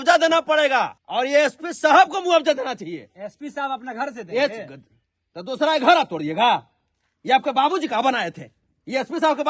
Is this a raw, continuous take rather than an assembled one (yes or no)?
no